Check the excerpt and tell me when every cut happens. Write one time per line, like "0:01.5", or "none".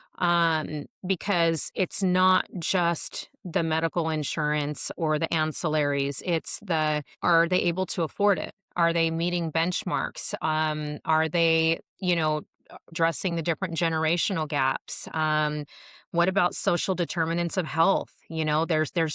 0:12.9